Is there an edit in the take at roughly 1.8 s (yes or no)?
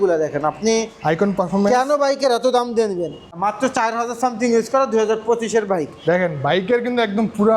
no